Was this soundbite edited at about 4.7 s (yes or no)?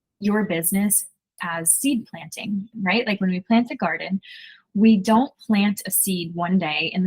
no